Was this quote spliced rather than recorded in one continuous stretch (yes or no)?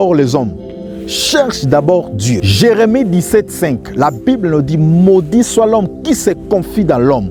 no